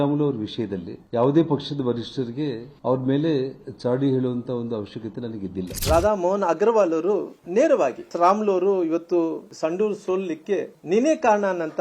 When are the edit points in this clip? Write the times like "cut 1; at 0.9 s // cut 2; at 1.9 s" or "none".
cut 1; at 1.0 s // cut 2; at 8.0 s // cut 3; at 9.5 s